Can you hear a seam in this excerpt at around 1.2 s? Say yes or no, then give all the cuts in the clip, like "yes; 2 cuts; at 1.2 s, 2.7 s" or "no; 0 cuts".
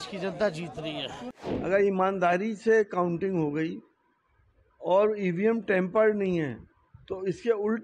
yes; 1 cut; at 1.2 s